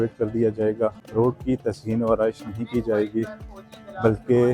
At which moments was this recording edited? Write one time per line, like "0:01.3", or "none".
0:01.0